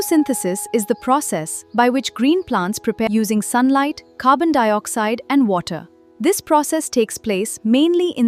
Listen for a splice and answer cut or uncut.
uncut